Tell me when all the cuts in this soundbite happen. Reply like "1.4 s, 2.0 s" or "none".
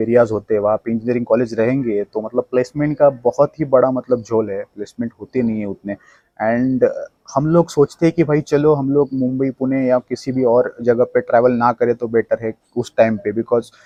none